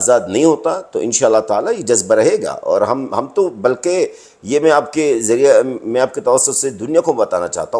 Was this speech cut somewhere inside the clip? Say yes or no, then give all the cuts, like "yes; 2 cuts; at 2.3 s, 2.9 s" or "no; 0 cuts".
no; 0 cuts